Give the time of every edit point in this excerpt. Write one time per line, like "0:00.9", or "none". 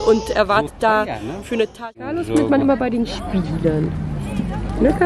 0:01.8